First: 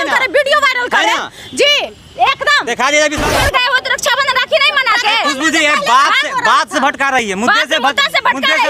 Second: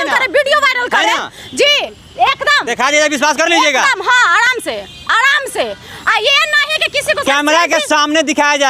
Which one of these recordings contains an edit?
first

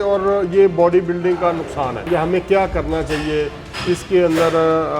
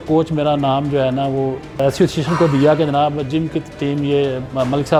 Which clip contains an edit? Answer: first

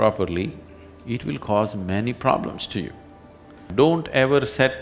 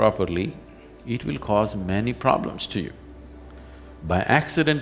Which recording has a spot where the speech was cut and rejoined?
first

